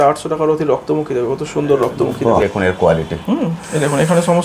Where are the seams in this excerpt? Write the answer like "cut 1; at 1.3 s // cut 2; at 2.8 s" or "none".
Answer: cut 1; at 2.4 s